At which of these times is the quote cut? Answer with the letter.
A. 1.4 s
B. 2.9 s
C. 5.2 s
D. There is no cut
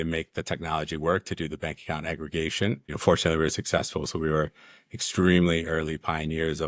B